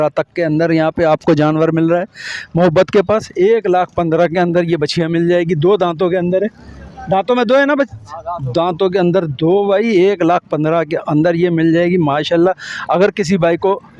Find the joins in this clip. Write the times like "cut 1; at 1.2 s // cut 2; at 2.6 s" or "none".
none